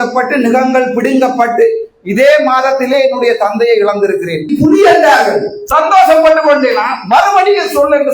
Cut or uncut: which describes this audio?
cut